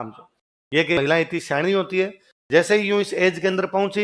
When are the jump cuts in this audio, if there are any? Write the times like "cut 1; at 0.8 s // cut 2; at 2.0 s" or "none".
cut 1; at 1.0 s